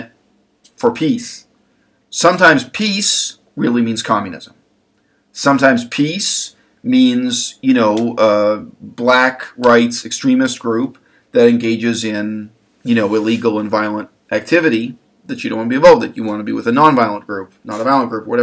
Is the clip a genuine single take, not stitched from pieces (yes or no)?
yes